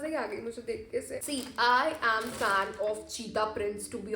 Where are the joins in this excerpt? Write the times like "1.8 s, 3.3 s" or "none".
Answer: 1.2 s